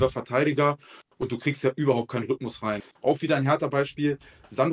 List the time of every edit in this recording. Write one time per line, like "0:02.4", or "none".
0:02.9